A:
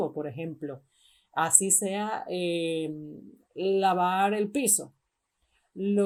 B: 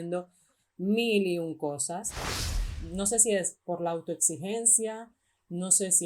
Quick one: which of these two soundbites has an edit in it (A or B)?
B